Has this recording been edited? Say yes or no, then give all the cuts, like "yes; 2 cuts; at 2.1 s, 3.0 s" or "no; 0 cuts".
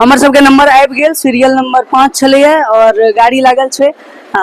no; 0 cuts